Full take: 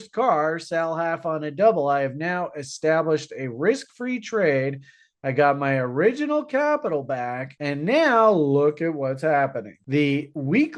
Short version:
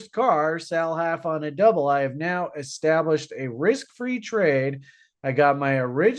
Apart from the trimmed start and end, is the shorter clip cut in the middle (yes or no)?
no